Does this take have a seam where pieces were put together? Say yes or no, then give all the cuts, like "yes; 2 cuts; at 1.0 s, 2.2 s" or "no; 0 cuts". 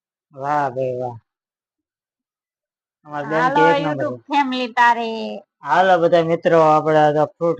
no; 0 cuts